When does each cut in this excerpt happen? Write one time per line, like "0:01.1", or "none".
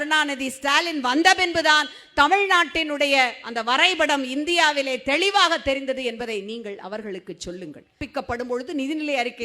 0:08.0